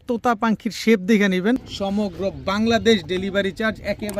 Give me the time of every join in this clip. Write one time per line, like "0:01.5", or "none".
0:01.7